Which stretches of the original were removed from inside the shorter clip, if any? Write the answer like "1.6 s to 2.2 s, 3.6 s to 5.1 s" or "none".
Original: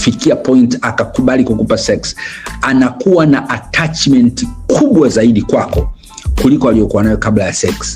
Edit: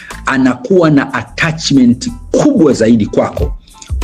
none